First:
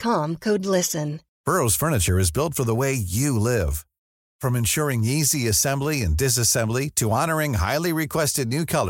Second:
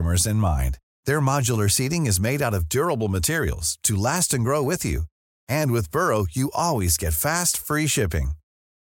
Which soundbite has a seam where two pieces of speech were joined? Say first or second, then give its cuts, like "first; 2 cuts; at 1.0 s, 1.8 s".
first; 1 cut; at 1.2 s